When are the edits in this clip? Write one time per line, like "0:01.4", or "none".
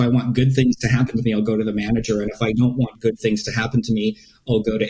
none

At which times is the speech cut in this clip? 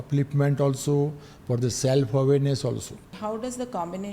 0:03.1

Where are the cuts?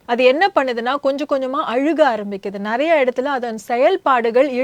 none

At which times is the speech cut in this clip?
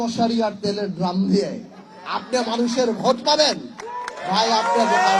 none

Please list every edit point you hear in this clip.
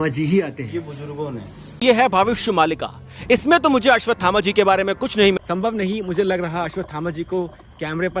0:01.8
0:05.4

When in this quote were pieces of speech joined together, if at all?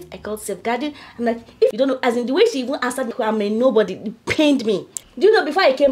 0:01.7
0:03.1
0:04.9

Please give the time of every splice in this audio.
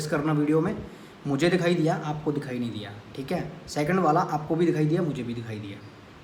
none

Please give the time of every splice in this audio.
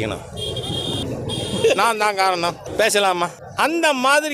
0:01.0
0:02.6
0:03.4

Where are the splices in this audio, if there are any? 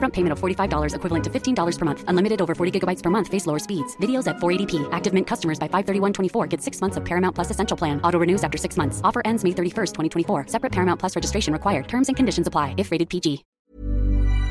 0:13.5

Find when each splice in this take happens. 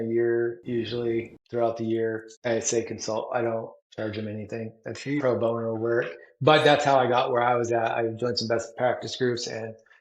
0:00.9
0:02.3
0:03.8

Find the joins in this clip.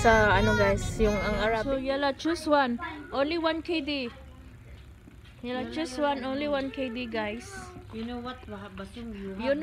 0:01.6

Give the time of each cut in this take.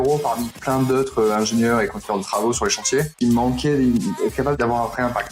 0:03.1

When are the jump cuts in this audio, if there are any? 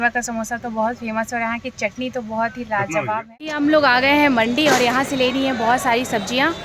0:03.4

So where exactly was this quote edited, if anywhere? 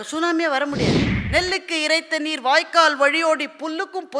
0:01.1

